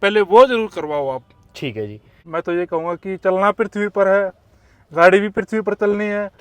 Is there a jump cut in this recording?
yes; 1 cut; at 2.2 s

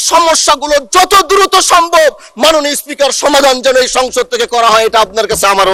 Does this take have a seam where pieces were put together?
no; 0 cuts

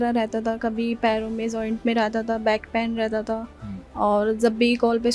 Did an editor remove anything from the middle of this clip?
no; 0 cuts

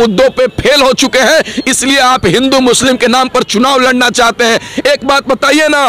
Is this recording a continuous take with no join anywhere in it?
yes; 0 cuts

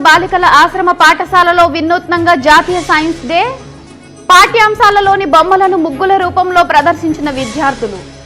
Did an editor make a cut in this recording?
no; 0 cuts

